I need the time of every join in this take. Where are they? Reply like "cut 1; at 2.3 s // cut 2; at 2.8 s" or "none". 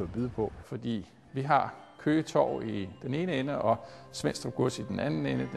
cut 1; at 1.1 s